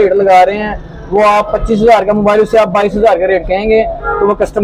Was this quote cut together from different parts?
no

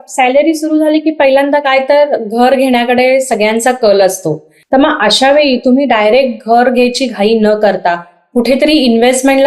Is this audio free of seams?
no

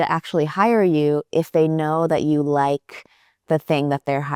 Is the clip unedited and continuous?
yes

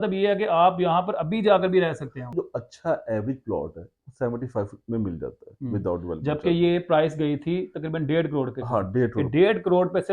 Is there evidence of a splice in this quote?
yes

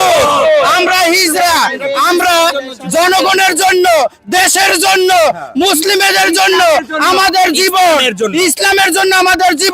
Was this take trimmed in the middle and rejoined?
no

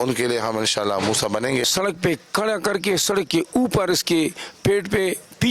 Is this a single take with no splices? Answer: no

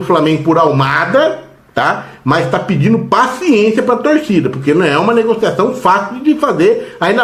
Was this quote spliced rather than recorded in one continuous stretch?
no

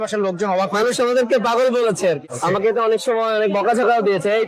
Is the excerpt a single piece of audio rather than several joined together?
no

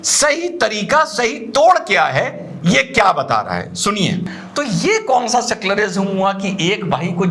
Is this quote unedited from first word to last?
no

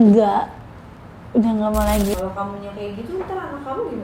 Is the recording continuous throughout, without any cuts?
no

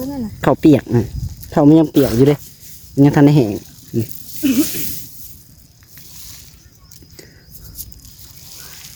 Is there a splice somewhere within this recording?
no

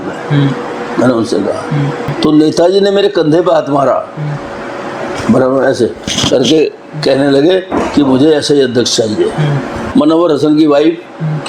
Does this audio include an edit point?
yes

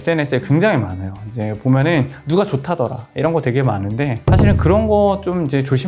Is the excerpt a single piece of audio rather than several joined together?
yes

